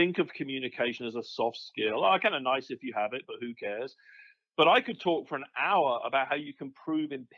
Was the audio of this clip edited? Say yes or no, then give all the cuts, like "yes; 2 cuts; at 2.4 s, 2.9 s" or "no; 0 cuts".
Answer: no; 0 cuts